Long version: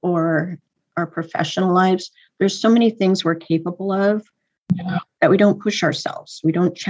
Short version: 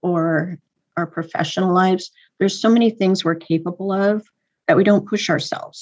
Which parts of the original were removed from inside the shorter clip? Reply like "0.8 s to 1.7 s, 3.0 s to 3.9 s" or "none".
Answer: 4.5 s to 5.0 s